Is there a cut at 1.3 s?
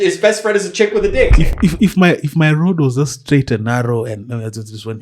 yes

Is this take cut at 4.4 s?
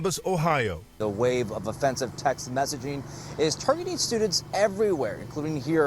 no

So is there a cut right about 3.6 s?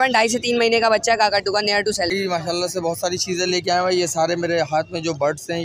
no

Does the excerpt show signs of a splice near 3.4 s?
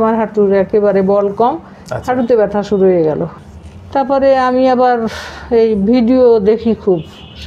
yes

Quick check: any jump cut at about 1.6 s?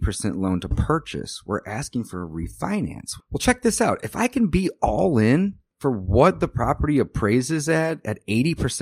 no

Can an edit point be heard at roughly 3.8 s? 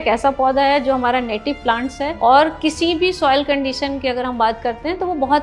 no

